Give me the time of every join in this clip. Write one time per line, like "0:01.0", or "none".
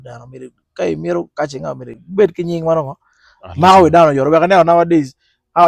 none